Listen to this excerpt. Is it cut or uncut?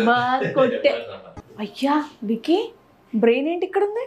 cut